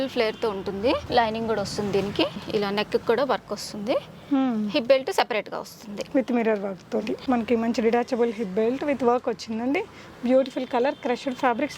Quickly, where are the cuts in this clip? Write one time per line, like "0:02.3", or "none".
0:01.0
0:02.4
0:07.2